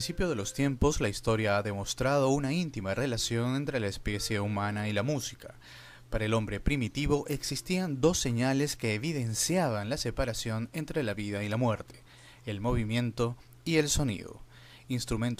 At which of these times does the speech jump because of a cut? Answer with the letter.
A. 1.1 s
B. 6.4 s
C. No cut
C